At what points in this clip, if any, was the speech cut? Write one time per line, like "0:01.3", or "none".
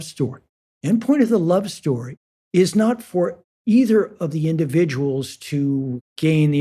0:03.5